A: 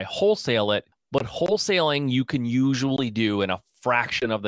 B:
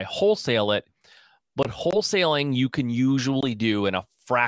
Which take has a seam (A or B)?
A